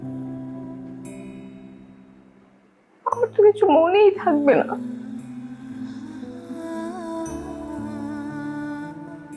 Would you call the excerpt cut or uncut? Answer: uncut